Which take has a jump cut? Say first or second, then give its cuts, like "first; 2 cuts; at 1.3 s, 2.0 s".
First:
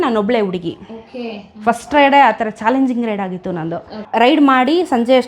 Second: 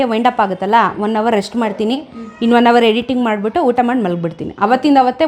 first; 1 cut; at 3.9 s